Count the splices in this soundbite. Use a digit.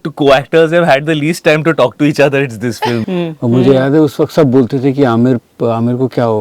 1